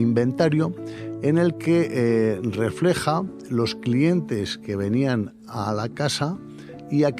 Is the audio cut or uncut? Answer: uncut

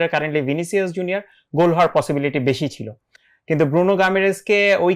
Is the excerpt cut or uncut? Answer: uncut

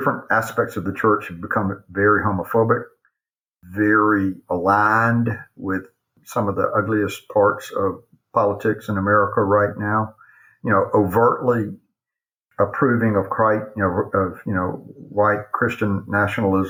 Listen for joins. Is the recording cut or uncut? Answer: uncut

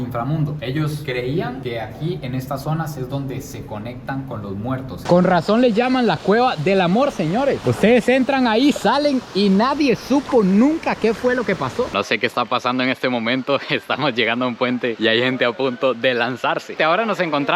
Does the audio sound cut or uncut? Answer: cut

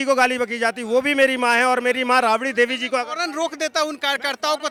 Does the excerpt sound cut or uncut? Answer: uncut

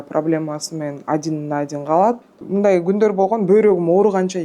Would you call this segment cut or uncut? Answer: cut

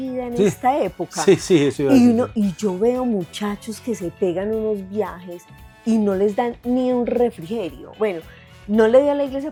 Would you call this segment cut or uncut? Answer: uncut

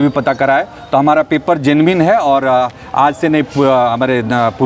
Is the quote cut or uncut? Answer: uncut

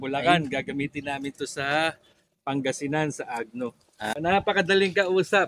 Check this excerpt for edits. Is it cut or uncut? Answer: cut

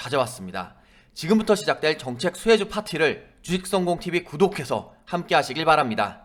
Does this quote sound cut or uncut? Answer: uncut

